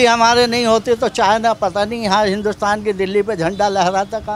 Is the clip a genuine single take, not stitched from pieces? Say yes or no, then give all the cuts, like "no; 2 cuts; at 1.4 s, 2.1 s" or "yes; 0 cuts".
yes; 0 cuts